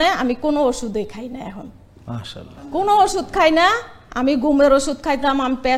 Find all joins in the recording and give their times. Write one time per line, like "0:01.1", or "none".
0:02.5

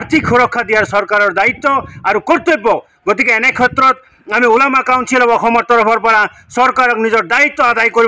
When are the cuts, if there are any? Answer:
none

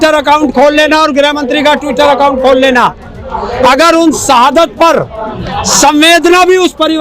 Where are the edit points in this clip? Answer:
none

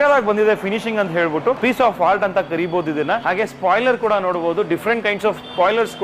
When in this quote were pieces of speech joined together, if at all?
0:01.6
0:03.2

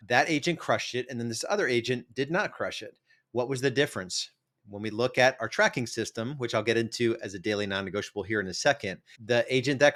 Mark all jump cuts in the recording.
none

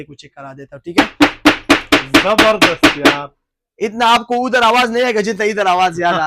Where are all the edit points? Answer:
none

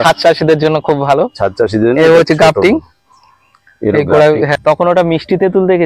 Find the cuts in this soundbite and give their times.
0:04.5

